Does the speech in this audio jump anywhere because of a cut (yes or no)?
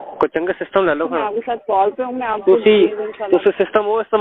no